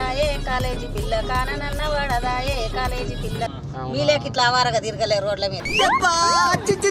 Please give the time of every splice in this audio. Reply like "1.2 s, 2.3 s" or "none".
3.5 s